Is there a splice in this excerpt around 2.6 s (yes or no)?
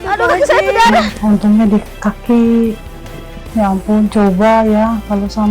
no